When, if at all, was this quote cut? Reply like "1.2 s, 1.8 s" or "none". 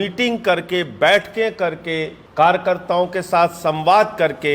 2.2 s